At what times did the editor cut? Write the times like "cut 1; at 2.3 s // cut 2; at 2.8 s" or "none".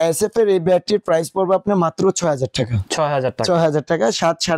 none